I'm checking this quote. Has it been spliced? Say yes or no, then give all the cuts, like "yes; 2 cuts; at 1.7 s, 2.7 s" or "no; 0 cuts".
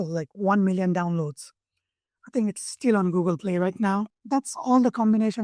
yes; 1 cut; at 4.2 s